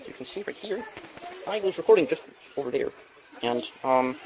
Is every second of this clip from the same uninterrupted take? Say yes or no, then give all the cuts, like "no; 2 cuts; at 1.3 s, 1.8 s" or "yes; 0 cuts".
no; 1 cut; at 1.1 s